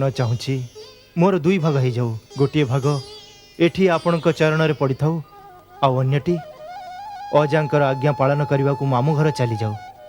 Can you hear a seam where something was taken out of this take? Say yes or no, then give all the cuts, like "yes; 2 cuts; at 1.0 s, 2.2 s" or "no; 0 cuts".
yes; 1 cut; at 2.2 s